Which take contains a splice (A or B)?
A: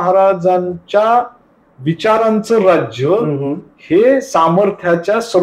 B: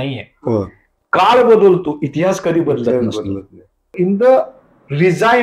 B